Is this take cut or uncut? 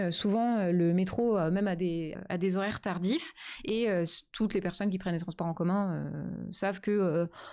cut